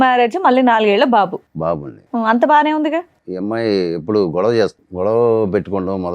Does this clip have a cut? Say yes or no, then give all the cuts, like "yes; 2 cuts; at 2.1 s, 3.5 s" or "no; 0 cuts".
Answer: yes; 2 cuts; at 3.2 s, 4.8 s